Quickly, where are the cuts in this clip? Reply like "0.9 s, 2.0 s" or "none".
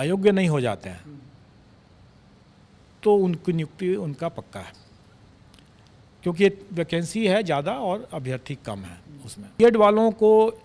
9.6 s

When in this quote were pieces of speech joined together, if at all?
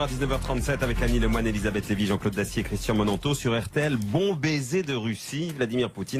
none

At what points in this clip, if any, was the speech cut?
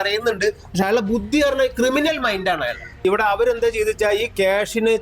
3.0 s

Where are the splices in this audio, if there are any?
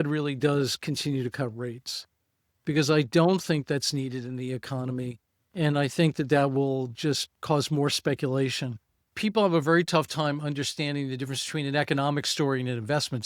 9.1 s

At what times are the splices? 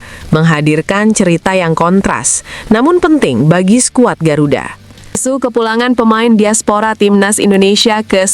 5.2 s

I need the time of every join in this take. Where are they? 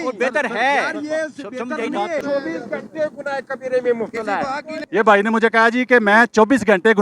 2.2 s, 4.7 s

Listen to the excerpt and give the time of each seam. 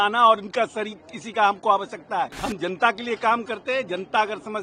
2.4 s

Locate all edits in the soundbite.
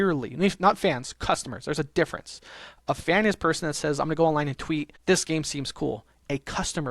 4.9 s

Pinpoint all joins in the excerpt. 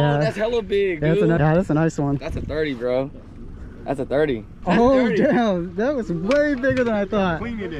1.4 s, 4.6 s

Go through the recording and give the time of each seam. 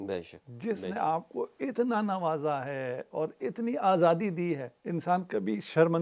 4.7 s

